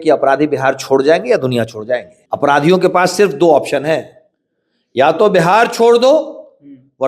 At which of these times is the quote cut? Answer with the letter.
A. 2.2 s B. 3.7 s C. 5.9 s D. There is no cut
A